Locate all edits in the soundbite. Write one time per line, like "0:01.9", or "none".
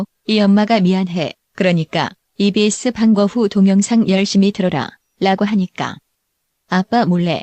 0:01.1